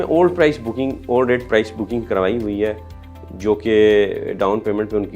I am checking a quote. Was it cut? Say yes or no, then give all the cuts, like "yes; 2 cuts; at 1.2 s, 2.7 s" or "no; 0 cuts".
no; 0 cuts